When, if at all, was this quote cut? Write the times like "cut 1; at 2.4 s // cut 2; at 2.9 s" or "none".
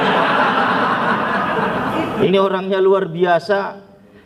cut 1; at 2.3 s